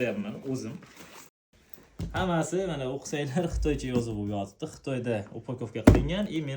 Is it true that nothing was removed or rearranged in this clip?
no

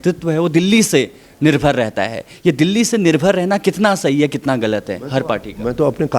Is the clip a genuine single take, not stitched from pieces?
yes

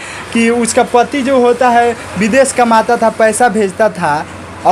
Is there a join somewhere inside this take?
no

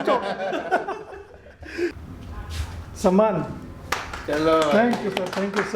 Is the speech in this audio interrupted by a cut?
yes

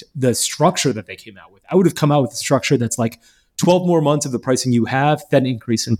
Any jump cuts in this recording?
no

